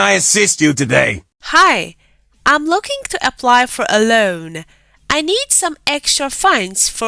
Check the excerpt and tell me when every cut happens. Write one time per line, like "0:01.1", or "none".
0:01.3

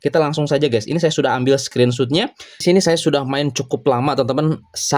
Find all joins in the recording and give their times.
0:02.6

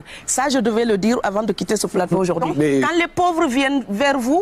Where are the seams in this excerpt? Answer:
0:02.7

